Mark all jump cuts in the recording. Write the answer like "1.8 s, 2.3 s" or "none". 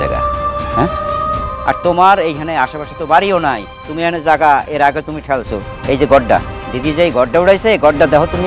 none